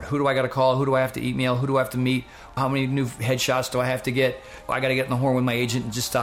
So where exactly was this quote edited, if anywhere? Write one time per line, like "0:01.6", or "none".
0:02.6
0:04.7